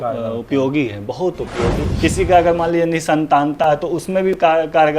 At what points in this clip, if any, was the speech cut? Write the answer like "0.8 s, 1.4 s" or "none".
1.8 s